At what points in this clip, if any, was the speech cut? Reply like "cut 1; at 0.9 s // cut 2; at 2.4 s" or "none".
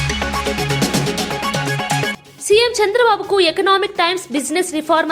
cut 1; at 2.2 s